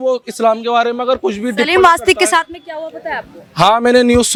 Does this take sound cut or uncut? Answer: uncut